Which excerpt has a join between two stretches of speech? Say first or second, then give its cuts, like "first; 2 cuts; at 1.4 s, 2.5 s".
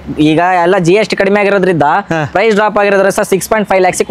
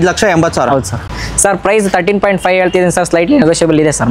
second; 1 cut; at 1.0 s